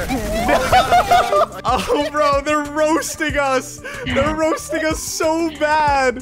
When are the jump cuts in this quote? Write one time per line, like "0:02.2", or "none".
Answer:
0:01.6